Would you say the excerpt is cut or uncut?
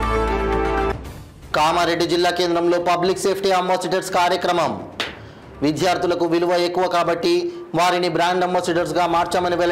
uncut